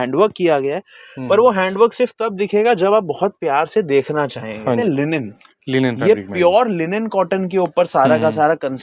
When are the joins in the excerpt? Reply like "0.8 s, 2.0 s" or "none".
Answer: 4.8 s